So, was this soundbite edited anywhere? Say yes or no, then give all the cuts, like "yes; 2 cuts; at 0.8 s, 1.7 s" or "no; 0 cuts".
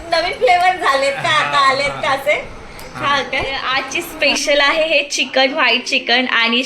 yes; 1 cut; at 3.6 s